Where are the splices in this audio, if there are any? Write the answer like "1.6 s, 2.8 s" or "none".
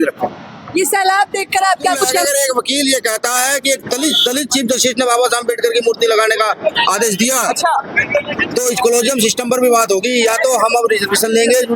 2.3 s